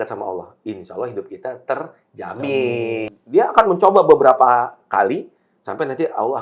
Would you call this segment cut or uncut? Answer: cut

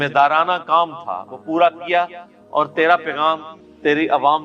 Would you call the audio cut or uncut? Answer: uncut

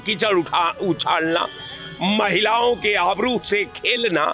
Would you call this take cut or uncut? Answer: uncut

